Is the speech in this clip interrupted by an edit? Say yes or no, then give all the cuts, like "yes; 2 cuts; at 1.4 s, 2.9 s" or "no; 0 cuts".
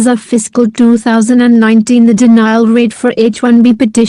yes; 1 cut; at 2.0 s